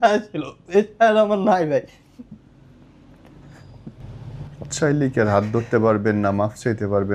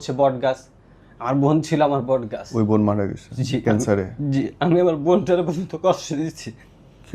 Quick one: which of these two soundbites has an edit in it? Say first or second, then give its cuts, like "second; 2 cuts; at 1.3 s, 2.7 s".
second; 2 cuts; at 2.4 s, 3.6 s